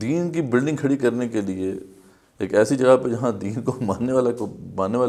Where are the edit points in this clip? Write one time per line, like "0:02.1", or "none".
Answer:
none